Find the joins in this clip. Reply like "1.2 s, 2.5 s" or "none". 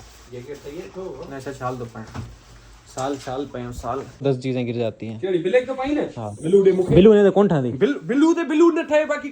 4.2 s